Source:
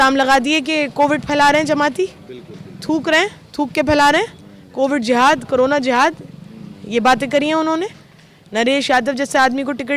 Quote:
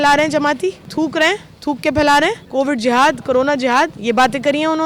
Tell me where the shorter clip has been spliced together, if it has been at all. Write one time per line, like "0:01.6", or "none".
0:00.8
0:02.4
0:04.0